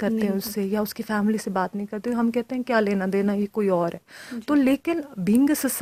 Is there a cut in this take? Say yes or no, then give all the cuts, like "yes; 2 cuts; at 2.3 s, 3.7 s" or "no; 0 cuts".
no; 0 cuts